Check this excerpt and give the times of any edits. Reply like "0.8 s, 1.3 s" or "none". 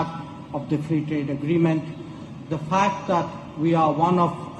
none